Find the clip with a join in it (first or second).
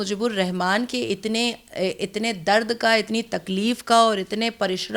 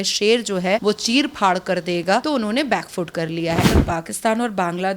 second